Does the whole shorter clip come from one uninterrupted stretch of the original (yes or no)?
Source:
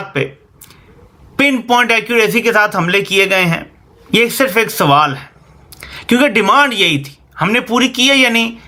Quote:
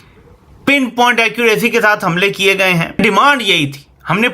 no